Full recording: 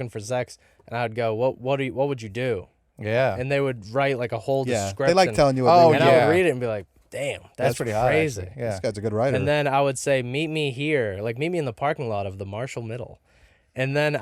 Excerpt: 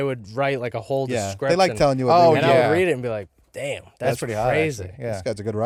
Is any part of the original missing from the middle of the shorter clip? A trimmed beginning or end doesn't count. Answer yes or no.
no